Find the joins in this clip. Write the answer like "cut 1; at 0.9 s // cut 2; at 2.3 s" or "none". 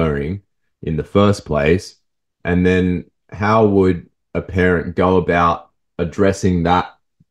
none